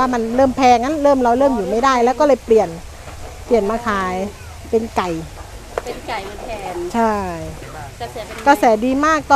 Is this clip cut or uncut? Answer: uncut